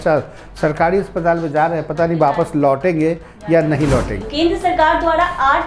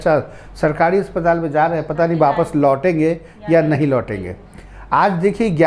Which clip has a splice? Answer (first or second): first